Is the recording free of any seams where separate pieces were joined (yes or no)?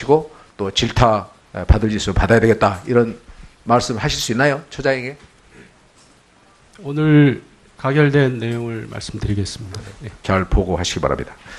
no